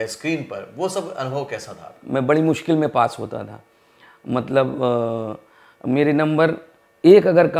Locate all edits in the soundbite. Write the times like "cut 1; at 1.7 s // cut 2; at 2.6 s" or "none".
cut 1; at 1.9 s